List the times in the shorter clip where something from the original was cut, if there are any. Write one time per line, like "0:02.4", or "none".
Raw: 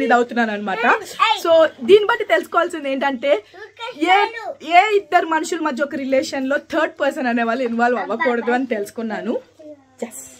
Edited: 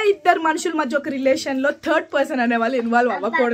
none